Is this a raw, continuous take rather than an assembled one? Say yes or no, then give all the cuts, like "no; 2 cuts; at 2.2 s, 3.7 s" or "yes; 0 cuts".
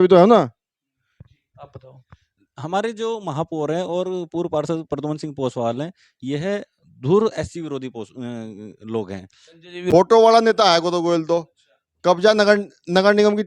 no; 1 cut; at 9.8 s